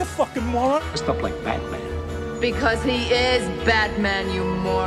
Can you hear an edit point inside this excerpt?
no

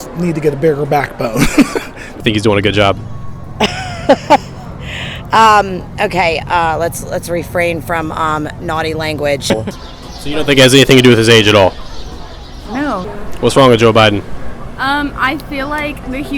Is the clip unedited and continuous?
no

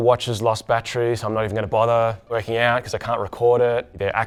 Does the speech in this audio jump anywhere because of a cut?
no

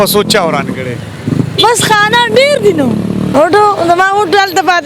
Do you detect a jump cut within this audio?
yes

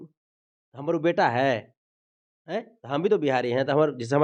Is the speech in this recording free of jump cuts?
yes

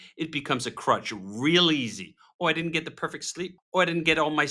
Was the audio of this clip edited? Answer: yes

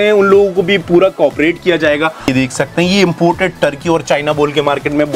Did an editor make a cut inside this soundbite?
yes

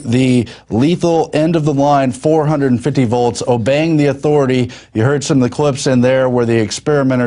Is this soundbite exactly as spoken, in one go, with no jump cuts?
yes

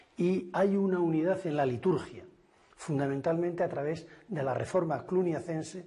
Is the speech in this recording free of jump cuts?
yes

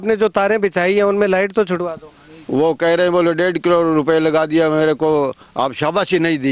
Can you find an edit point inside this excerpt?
no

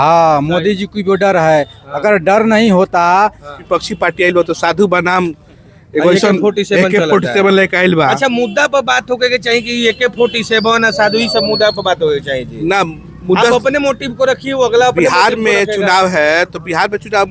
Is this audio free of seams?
no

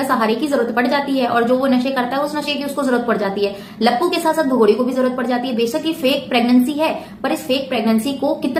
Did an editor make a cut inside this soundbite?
no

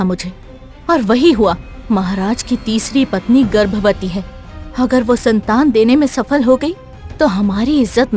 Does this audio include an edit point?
yes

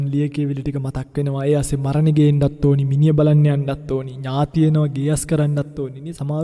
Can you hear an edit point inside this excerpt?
no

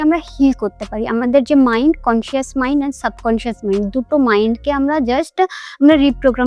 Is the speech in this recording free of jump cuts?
yes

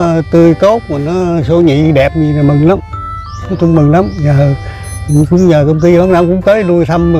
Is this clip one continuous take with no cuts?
yes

